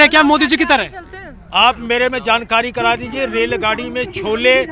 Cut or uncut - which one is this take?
uncut